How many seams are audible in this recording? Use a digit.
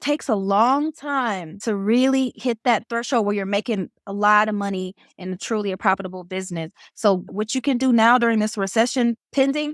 1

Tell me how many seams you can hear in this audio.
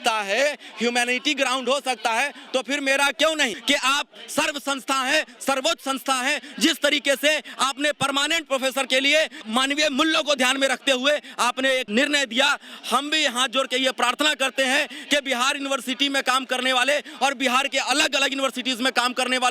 3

